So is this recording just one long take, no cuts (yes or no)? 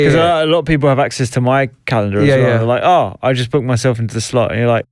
yes